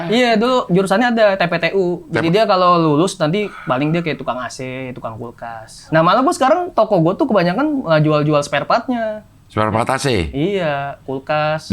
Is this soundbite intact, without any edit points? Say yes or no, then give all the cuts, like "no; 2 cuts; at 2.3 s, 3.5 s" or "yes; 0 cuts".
no; 1 cut; at 5.7 s